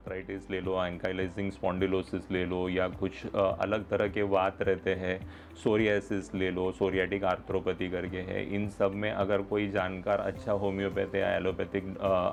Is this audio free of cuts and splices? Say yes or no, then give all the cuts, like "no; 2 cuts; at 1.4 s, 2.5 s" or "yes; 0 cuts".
yes; 0 cuts